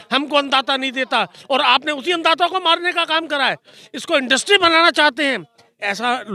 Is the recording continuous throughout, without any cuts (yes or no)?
yes